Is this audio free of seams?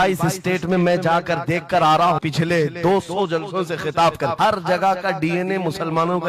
no; 2 cuts; at 2.2 s, 4.3 s

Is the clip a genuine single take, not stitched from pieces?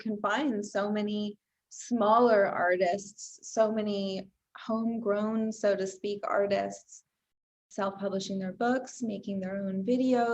no; 1 cut; at 7.6 s

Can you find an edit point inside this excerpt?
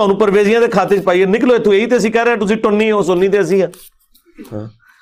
yes; 1 cut; at 3.8 s

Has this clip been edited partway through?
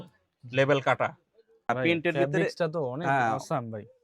yes; 1 cut; at 1.7 s

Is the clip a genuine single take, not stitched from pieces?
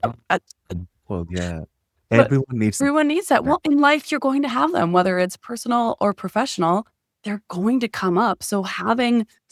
yes; 0 cuts

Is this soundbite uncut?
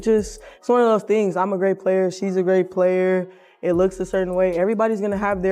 yes; 0 cuts

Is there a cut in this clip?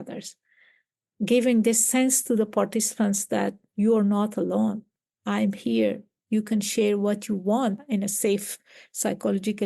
yes; 1 cut; at 7.8 s

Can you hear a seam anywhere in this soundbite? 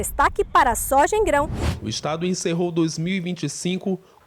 yes; 1 cut; at 1.6 s

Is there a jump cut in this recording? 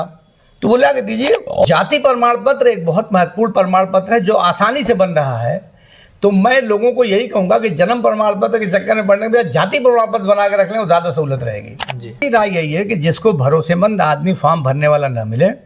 yes; 2 cuts; at 1.6 s, 12.2 s

